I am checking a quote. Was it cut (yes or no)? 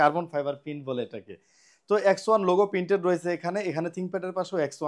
no